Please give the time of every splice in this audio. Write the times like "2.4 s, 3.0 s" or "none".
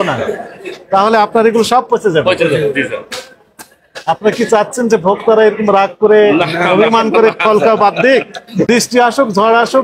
8.7 s